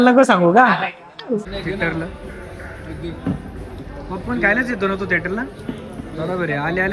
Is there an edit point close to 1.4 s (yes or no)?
yes